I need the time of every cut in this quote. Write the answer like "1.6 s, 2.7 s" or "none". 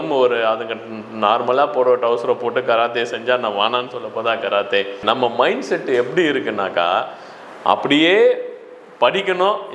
5.0 s